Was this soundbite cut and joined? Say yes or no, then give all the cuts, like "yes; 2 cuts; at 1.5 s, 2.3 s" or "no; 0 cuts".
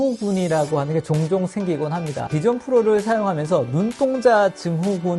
yes; 1 cut; at 2.3 s